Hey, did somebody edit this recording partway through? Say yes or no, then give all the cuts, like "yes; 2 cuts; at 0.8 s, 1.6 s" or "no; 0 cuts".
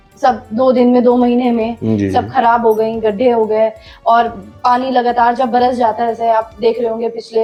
no; 0 cuts